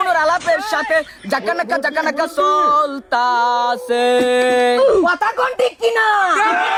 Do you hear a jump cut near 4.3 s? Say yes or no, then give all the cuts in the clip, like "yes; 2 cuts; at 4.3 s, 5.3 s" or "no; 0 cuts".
no; 0 cuts